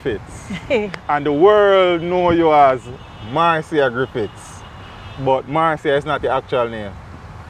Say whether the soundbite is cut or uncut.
uncut